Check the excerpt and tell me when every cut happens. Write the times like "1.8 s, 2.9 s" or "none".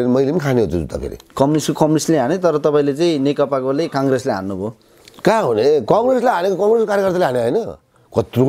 none